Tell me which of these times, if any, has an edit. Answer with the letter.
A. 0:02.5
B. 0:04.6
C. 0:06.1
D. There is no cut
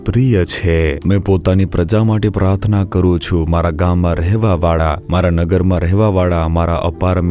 D